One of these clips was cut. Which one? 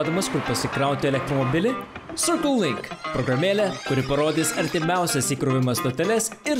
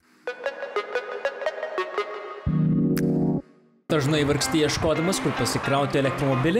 second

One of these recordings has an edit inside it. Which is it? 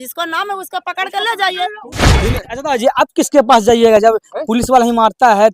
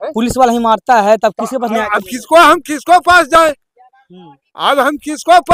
first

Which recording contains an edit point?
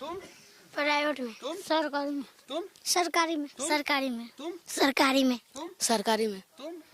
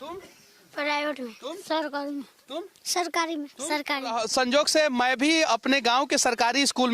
second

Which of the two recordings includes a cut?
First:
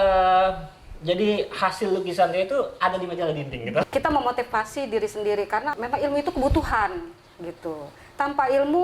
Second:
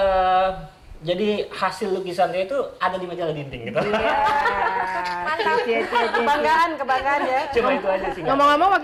first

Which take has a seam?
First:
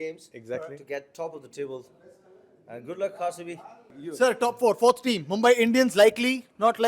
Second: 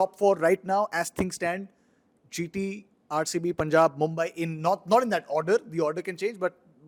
first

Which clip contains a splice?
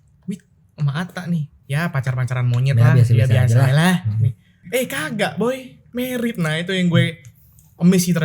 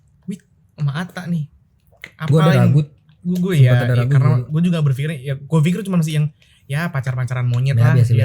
first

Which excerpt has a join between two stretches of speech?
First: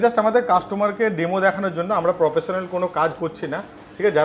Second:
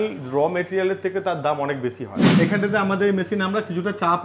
second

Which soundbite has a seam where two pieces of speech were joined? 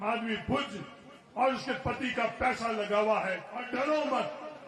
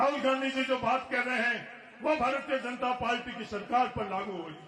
first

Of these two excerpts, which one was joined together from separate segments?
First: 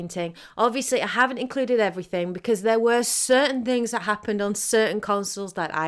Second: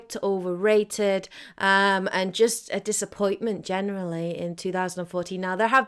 first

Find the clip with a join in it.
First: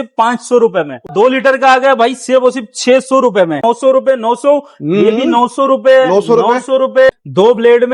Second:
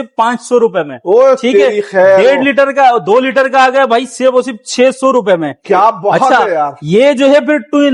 first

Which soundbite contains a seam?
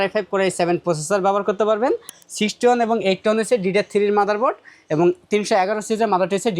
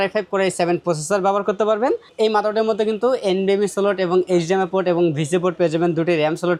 first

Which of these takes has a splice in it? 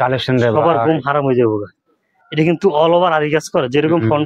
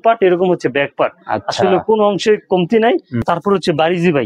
second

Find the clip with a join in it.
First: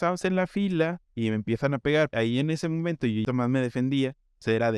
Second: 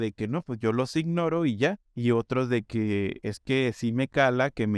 first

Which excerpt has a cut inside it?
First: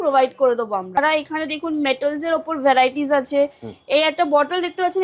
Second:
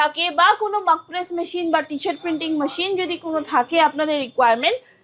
first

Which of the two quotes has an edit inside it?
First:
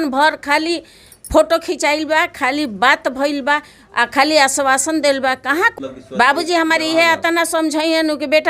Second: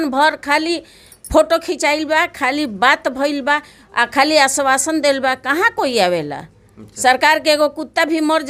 first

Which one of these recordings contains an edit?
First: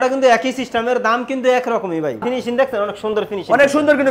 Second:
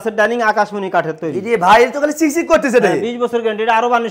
first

